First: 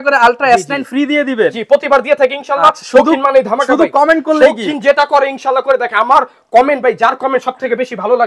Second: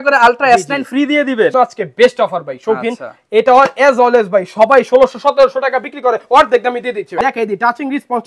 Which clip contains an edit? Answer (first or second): second